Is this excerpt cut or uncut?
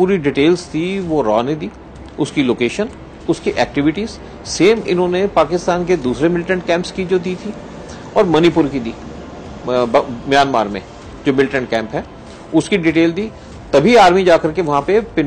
uncut